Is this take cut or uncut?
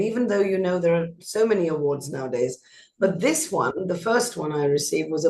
uncut